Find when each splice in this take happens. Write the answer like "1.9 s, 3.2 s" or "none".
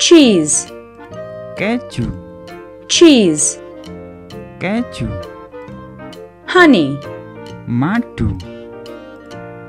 none